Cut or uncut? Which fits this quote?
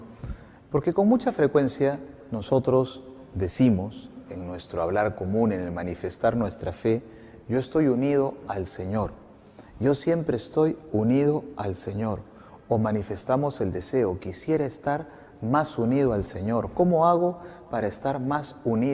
cut